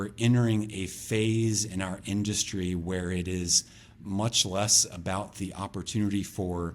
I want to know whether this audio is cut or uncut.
uncut